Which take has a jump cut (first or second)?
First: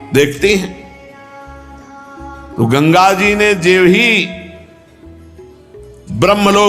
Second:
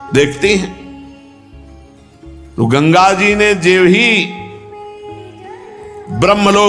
second